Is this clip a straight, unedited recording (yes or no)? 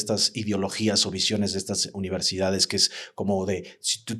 yes